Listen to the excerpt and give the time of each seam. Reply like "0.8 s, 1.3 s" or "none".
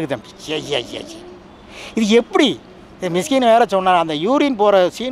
none